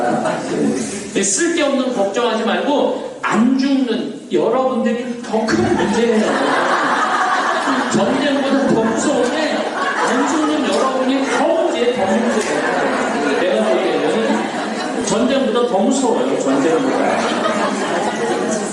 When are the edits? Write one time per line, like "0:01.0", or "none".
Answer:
none

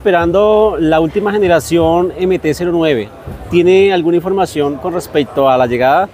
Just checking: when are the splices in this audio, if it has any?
none

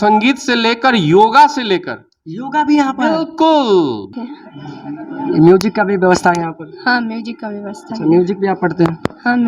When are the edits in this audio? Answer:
0:04.1

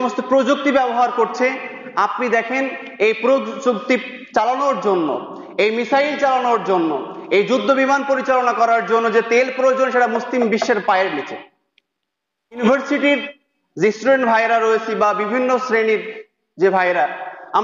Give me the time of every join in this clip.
0:12.6

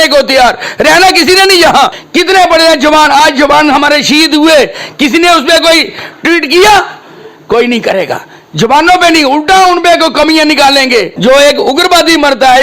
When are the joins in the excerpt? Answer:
0:02.0
0:11.1

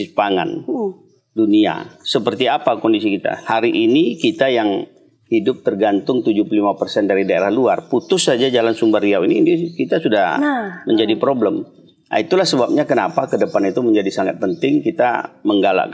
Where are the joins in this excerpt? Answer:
none

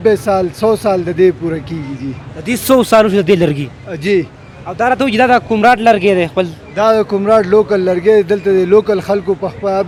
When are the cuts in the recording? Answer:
none

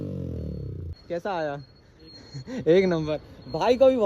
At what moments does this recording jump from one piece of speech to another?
0:01.0

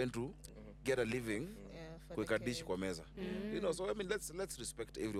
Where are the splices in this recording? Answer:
none

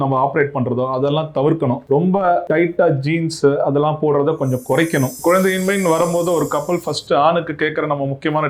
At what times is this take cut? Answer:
0:05.1

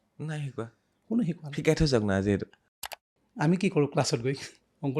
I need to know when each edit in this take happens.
0:02.8

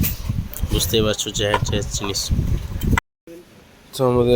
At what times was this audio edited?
0:03.0

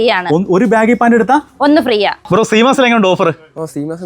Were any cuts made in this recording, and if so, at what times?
0:02.2

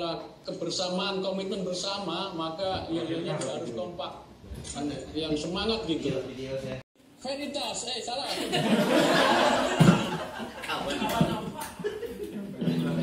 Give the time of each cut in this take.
0:07.0

